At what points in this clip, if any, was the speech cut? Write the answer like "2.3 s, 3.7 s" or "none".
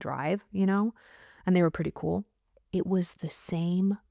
none